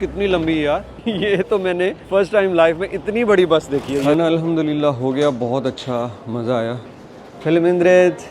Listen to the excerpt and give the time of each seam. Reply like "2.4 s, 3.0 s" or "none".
0.9 s, 2.0 s, 4.1 s